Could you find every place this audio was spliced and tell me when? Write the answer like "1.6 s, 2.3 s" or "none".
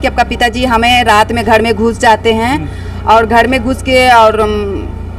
none